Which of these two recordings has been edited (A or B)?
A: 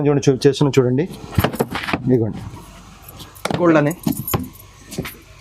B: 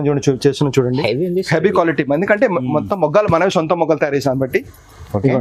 B